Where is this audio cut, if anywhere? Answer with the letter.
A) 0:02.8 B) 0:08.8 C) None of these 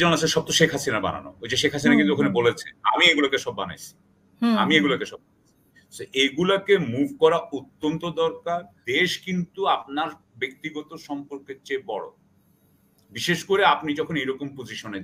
B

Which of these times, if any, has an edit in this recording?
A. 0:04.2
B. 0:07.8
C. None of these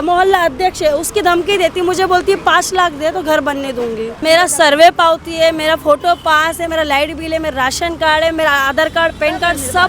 A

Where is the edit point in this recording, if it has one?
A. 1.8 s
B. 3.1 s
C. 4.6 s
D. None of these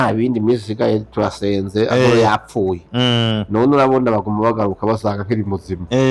D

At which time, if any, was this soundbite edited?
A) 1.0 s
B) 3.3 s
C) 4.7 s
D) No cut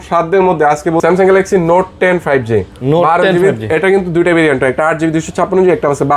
A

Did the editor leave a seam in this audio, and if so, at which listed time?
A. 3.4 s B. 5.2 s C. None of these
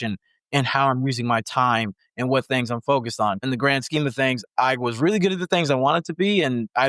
A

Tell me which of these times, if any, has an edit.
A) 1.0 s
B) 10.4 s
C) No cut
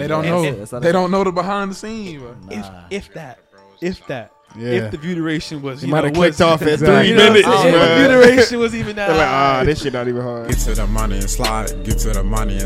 B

